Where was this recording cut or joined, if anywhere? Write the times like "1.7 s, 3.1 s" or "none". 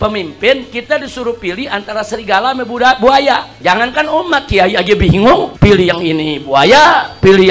3.5 s